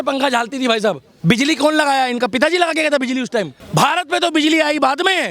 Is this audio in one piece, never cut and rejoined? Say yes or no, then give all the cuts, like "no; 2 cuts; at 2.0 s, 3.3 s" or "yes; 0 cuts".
no; 2 cuts; at 1.1 s, 3.6 s